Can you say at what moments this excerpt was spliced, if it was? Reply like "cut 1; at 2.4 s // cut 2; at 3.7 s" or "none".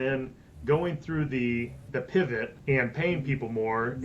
cut 1; at 1.8 s // cut 2; at 2.5 s